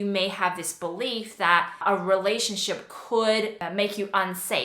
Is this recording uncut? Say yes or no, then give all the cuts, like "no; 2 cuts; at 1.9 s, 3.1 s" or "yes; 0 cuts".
no; 1 cut; at 1.8 s